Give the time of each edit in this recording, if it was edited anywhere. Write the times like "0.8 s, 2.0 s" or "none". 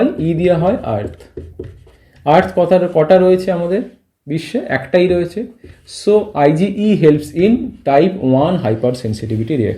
none